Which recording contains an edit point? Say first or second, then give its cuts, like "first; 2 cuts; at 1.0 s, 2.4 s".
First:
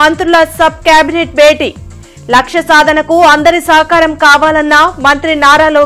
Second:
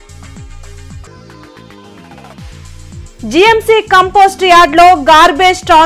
second; 1 cut; at 3.0 s